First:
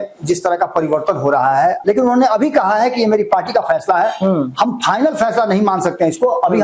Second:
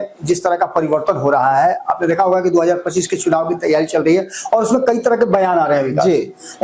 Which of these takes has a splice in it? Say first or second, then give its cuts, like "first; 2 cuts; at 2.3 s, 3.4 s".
first; 1 cut; at 1.8 s